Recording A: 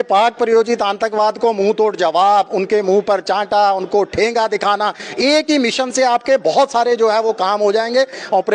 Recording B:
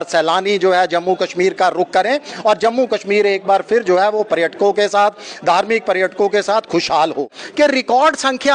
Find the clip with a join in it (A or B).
B